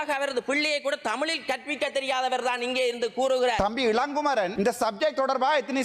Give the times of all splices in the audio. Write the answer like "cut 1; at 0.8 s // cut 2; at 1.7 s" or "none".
cut 1; at 3.6 s // cut 2; at 4.5 s